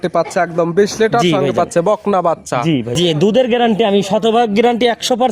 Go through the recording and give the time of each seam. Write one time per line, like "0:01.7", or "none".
0:02.9